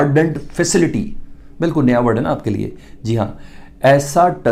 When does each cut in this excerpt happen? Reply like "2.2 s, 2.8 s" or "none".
none

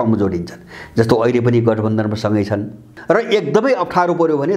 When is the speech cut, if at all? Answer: 2.9 s

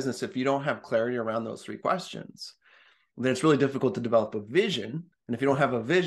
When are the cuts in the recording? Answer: none

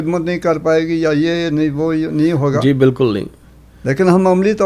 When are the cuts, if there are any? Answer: none

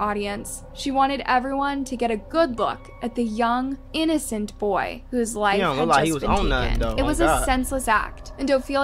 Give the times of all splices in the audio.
none

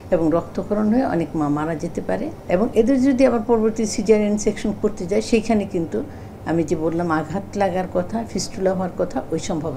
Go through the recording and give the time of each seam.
none

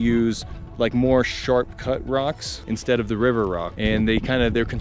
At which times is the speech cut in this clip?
2.5 s, 3.7 s

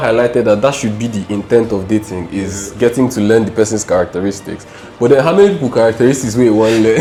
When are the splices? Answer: none

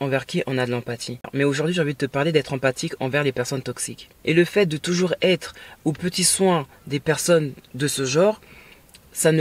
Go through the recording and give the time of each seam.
1.2 s, 4.1 s

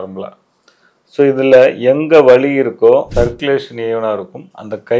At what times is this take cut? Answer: 3.1 s

